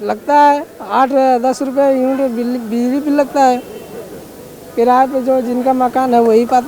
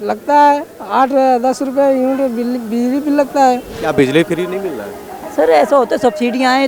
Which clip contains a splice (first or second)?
second